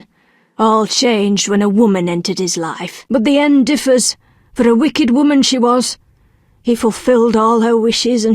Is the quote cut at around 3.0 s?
yes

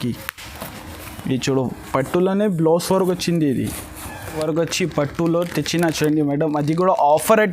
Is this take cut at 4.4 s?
yes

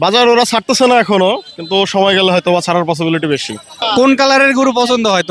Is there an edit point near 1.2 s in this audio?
no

